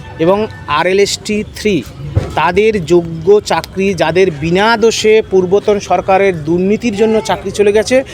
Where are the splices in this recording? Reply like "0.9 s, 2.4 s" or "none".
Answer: none

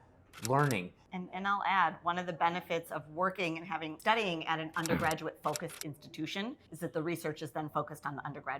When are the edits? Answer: 1.0 s, 3.9 s, 6.7 s

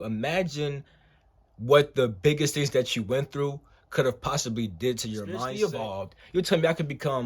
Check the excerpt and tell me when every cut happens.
5.5 s

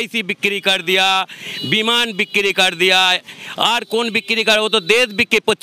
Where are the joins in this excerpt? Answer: none

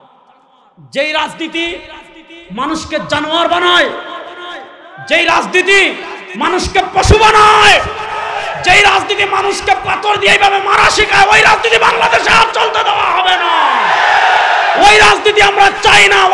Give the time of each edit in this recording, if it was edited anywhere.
none

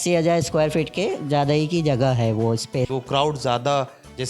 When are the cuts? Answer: 2.9 s

